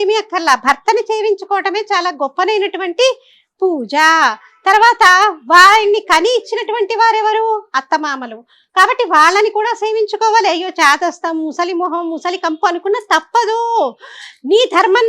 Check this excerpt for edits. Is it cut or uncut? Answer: uncut